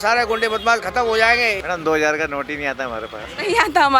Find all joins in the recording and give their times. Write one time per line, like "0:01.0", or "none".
0:01.6